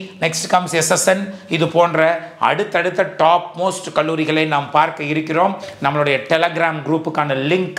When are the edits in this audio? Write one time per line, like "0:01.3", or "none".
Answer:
none